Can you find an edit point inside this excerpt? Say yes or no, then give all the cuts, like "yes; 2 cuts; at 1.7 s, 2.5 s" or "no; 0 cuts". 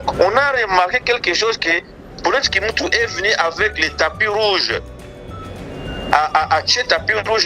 no; 0 cuts